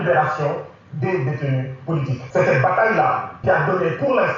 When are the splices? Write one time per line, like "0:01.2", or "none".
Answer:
0:02.2
0:03.3